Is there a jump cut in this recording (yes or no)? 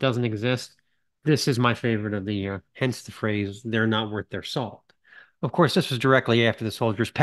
yes